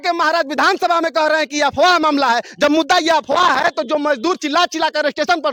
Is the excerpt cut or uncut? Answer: uncut